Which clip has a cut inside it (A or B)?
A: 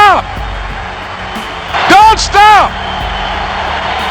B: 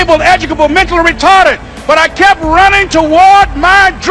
A